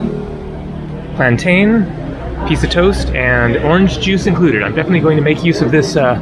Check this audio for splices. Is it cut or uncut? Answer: uncut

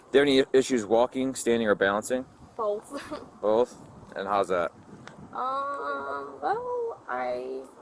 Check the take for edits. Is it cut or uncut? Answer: uncut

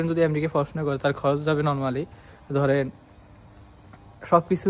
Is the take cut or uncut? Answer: uncut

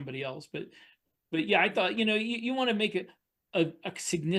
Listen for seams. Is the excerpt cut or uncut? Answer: uncut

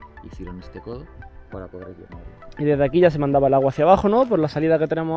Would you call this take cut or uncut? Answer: uncut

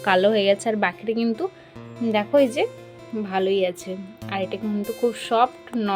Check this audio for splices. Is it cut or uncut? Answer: uncut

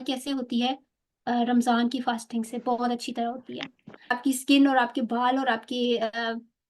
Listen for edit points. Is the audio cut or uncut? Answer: cut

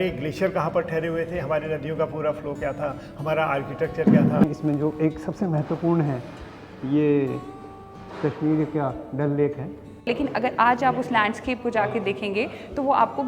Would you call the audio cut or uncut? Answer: cut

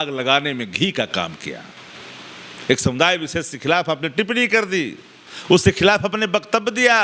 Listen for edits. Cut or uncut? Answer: uncut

